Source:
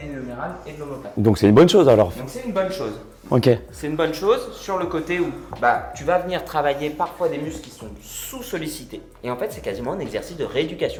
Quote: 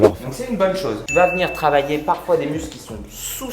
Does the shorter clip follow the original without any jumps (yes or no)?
no